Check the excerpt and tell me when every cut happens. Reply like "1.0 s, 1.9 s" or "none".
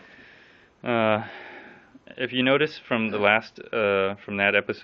none

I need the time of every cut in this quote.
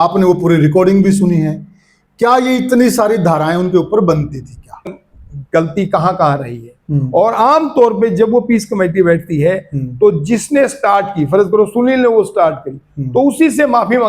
5.0 s

